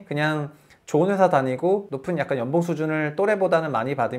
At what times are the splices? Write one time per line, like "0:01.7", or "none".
none